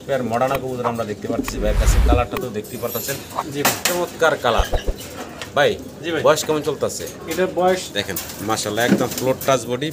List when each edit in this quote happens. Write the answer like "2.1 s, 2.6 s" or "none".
7.9 s